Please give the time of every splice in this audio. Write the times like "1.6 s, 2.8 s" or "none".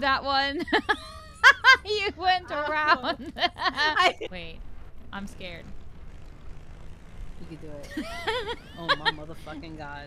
4.2 s